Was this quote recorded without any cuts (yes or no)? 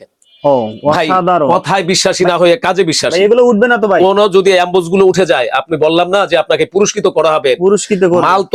yes